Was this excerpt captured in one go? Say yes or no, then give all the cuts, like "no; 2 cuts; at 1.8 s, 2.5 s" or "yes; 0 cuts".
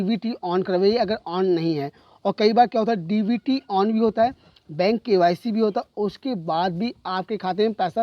yes; 0 cuts